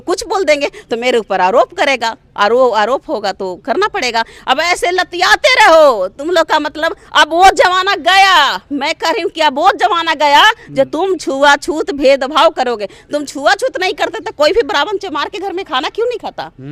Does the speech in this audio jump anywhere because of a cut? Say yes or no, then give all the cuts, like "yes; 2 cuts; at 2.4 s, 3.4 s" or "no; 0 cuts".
no; 0 cuts